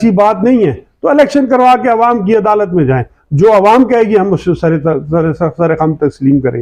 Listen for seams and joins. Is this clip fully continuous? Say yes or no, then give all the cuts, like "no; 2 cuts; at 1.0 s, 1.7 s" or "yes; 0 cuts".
yes; 0 cuts